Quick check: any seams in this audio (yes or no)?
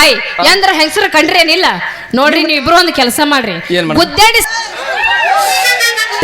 yes